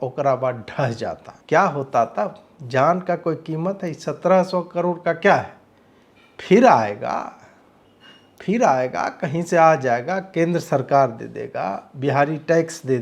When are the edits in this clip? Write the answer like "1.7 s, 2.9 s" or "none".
1.3 s